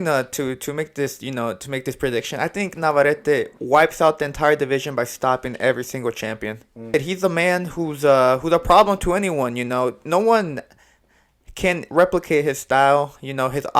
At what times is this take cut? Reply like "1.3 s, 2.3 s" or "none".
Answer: 6.9 s